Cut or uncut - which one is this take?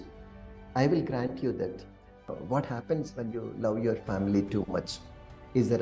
cut